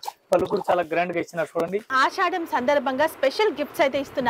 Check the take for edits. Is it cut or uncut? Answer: cut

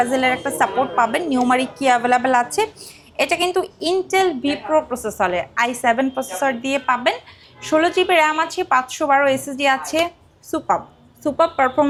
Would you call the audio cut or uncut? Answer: uncut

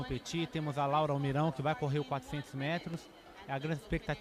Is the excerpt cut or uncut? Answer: uncut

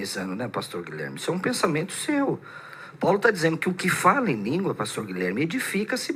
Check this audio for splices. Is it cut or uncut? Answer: uncut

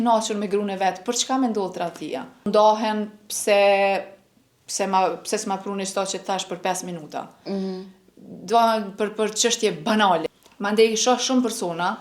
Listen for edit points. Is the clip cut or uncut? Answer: cut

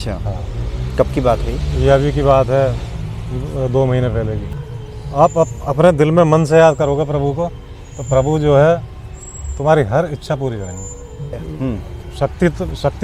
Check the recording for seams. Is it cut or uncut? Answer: cut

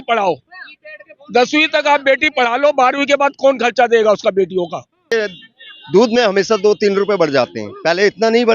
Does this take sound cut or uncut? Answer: cut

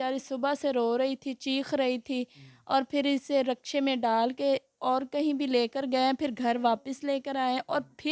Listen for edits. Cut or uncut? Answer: uncut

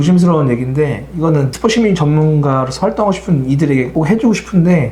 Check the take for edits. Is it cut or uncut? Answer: cut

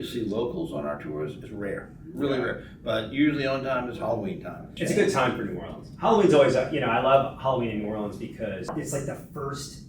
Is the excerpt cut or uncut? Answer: cut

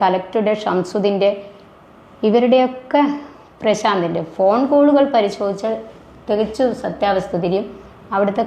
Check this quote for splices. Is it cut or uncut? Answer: uncut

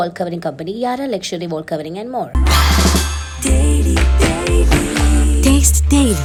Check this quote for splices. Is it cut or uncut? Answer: uncut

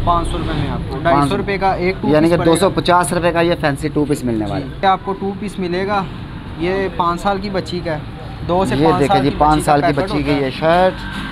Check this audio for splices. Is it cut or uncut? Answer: cut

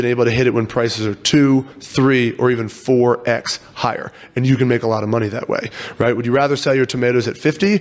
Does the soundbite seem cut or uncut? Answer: uncut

